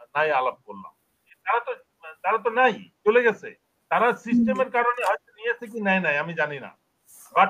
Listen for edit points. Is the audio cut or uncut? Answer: cut